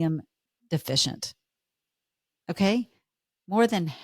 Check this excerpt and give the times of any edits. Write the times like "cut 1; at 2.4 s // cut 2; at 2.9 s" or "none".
none